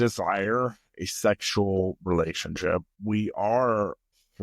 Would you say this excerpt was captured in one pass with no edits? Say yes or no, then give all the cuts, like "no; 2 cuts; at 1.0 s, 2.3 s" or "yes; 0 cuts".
no; 1 cut; at 2.9 s